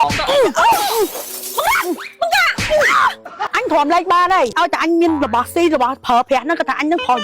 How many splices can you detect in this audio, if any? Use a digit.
2